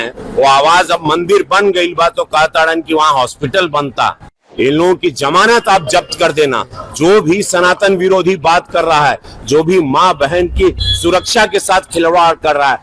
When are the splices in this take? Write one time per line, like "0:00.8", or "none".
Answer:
0:04.4